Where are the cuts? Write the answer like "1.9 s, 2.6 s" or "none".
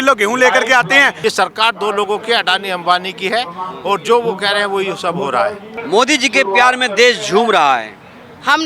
1.1 s, 5.8 s